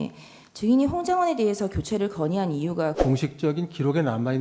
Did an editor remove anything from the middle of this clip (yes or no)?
yes